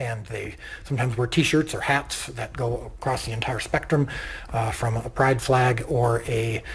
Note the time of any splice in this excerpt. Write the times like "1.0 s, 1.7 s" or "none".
none